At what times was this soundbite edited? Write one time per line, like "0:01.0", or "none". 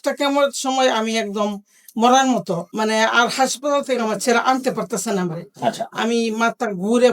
0:02.7